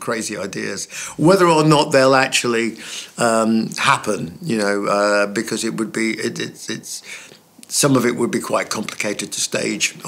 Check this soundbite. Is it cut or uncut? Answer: uncut